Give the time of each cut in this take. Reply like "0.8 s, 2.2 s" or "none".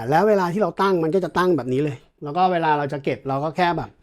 2.2 s